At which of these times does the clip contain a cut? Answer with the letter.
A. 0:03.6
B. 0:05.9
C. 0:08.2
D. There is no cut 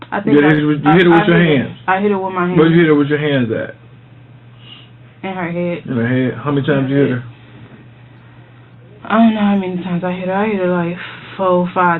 D